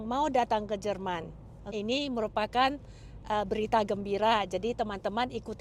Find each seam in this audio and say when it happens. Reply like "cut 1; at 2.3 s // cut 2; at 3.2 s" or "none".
cut 1; at 1.7 s